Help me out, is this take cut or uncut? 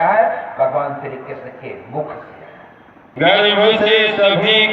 cut